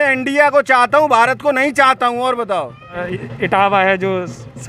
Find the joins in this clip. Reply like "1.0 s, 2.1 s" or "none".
3.0 s